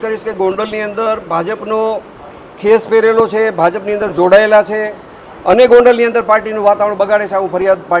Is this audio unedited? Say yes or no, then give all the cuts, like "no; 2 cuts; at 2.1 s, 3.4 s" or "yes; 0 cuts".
yes; 0 cuts